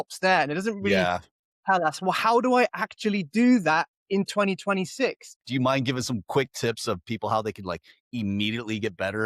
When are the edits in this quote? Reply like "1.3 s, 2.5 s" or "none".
5.3 s